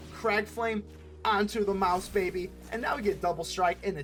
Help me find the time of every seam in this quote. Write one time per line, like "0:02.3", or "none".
none